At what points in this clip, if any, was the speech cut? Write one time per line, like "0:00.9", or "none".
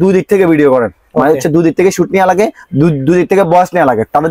none